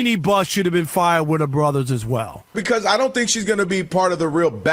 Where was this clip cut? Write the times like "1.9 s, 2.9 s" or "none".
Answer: 2.6 s